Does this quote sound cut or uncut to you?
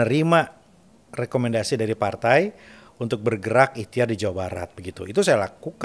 uncut